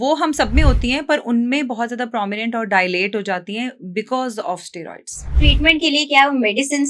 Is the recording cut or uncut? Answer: cut